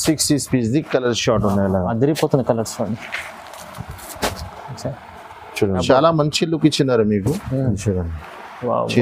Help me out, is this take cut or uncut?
cut